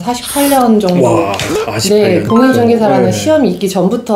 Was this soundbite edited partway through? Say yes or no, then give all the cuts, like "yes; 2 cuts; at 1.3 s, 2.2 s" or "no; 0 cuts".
yes; 1 cut; at 2.0 s